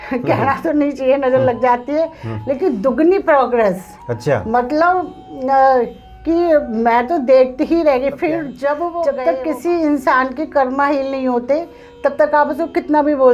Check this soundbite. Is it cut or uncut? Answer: cut